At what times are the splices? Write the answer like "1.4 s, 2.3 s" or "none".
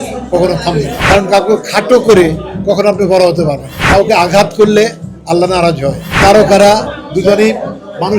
1.0 s, 3.8 s, 6.1 s